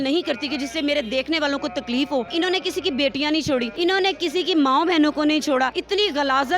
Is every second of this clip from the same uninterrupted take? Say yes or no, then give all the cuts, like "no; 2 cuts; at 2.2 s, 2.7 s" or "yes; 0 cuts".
no; 3 cuts; at 2.3 s, 3.7 s, 5.8 s